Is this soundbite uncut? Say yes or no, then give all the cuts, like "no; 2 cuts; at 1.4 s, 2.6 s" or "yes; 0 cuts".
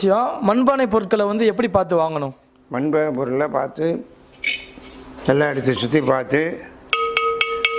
yes; 0 cuts